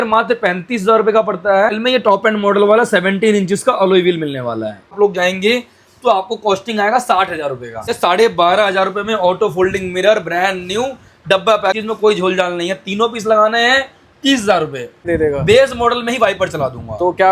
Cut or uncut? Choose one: cut